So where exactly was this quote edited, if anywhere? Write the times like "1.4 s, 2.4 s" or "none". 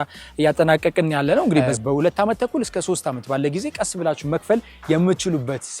1.7 s